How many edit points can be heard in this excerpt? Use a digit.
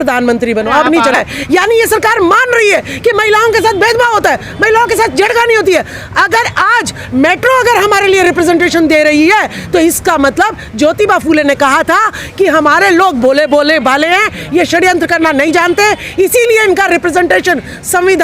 1